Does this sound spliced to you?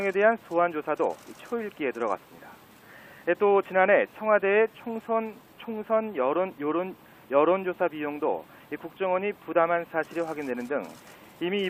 no; 0 cuts

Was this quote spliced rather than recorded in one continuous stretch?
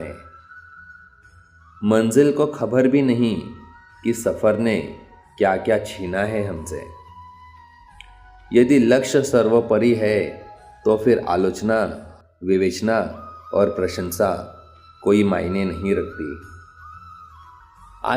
yes; 2 cuts; at 6.9 s, 8.5 s

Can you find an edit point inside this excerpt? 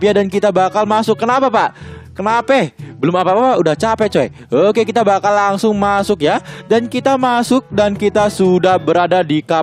yes; 1 cut; at 8.1 s

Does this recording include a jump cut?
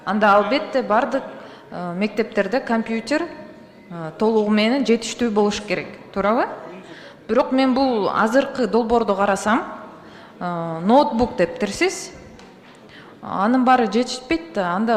no; 0 cuts

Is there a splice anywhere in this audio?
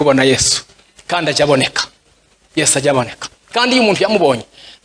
no; 0 cuts

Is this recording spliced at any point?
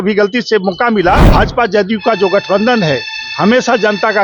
yes; 1 cut; at 1.2 s

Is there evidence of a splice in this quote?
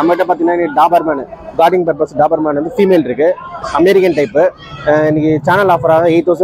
no; 0 cuts

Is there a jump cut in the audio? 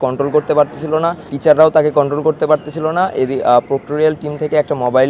yes; 1 cut; at 1.3 s

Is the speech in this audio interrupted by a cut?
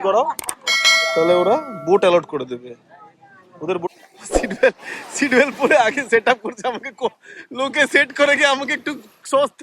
yes; 1 cut; at 3.9 s

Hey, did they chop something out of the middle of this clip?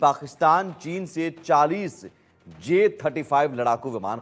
no; 0 cuts

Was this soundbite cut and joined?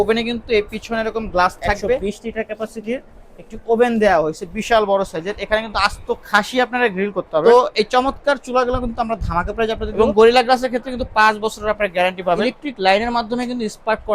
yes; 4 cuts; at 2.0 s, 7.4 s, 9.9 s, 12.4 s

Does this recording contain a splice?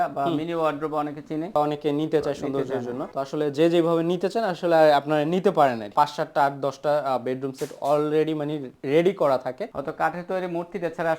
yes; 3 cuts; at 1.6 s, 5.9 s, 9.7 s

